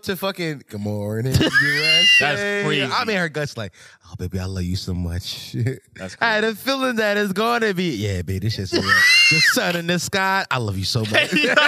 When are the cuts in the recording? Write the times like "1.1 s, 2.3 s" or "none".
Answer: 2.9 s

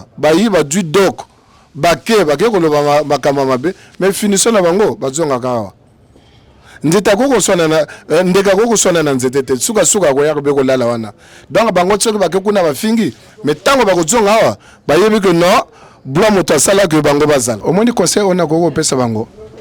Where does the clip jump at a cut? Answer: 17.6 s

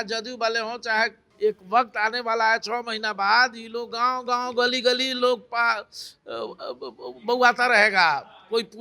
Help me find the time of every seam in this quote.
1.2 s

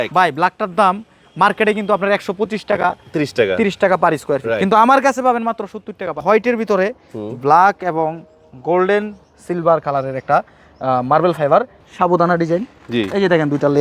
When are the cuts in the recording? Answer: 6.2 s, 11.8 s

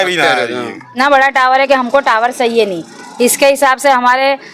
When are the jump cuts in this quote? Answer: 0.9 s

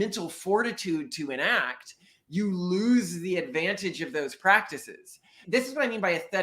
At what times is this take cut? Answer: 5.4 s

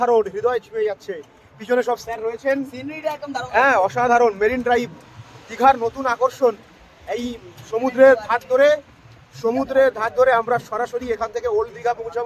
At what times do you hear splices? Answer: none

